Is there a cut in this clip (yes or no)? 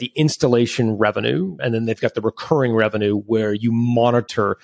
yes